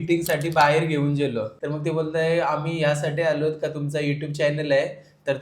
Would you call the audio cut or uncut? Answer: cut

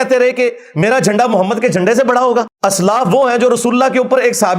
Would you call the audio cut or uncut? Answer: cut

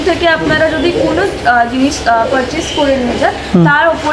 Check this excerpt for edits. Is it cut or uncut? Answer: uncut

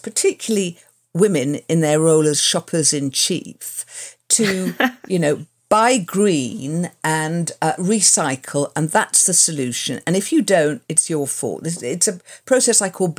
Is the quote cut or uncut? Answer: uncut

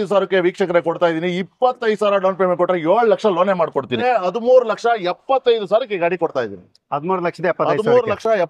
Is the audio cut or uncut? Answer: cut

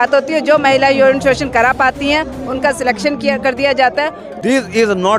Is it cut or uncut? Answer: cut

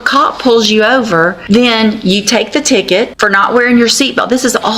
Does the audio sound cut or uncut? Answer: cut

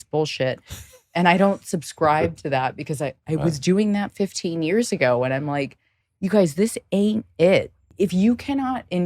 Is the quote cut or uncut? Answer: cut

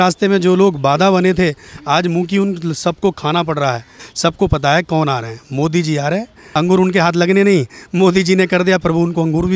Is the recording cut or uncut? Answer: cut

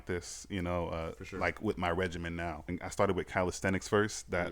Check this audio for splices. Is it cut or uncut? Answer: cut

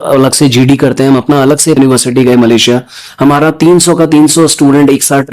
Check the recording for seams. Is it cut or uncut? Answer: cut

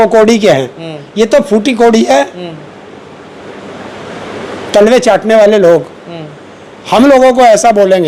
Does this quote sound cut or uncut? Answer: uncut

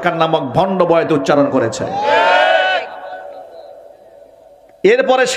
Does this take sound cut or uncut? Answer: uncut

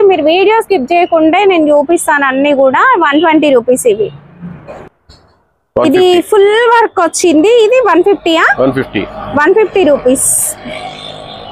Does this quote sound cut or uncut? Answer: uncut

